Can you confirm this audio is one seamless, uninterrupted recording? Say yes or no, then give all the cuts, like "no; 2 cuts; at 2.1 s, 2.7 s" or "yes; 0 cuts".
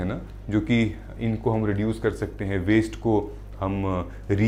yes; 0 cuts